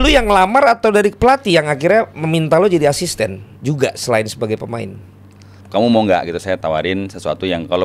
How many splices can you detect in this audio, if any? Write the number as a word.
two